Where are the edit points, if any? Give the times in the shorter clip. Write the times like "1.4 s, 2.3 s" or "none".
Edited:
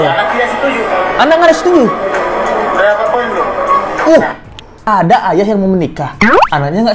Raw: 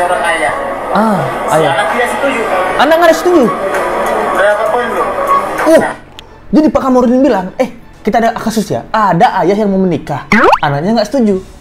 4.8 s